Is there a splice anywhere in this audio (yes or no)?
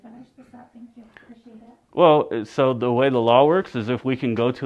yes